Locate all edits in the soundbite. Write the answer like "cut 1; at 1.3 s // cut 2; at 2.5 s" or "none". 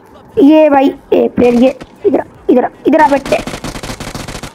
none